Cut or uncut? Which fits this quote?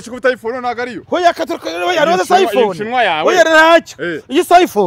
uncut